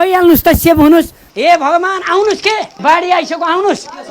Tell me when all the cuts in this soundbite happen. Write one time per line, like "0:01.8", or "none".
0:01.2